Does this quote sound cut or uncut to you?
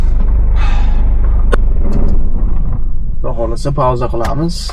uncut